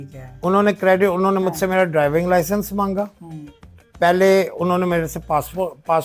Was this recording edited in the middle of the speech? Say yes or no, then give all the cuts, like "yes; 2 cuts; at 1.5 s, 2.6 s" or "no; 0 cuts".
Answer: no; 0 cuts